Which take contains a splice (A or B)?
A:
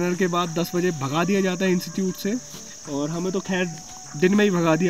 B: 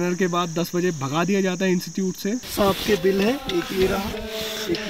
B